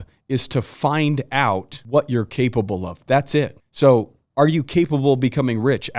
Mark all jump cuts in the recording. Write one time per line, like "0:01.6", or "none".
0:01.7
0:03.6

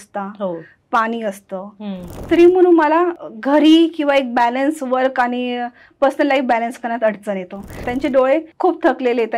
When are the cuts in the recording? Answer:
0:02.2
0:03.2
0:07.8
0:08.5

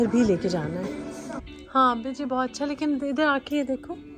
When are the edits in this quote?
0:01.4

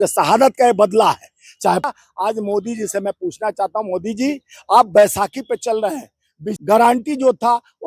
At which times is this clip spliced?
0:01.8
0:06.5

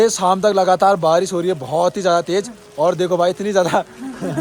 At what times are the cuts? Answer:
none

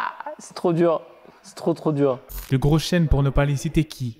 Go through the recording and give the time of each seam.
0:02.3

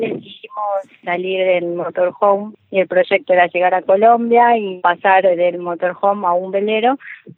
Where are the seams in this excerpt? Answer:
0:01.0
0:02.5
0:04.7

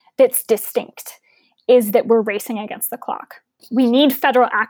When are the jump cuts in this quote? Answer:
0:03.6

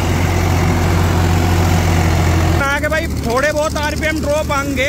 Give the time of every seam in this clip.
0:02.6

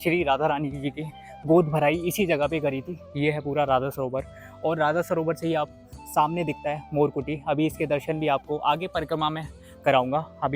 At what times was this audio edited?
0:02.9

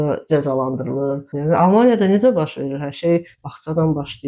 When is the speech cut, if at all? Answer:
0:01.3

